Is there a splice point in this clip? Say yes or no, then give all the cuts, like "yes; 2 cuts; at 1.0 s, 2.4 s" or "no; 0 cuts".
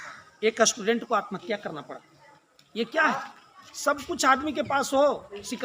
no; 0 cuts